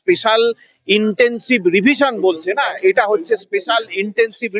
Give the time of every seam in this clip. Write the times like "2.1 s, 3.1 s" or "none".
none